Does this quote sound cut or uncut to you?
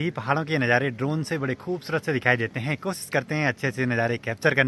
uncut